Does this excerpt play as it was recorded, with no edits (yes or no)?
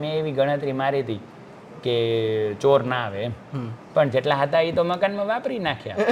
yes